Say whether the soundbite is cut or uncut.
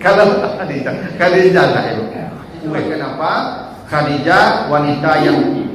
cut